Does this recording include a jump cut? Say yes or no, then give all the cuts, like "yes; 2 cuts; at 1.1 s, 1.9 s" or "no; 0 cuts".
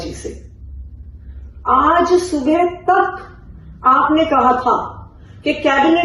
no; 0 cuts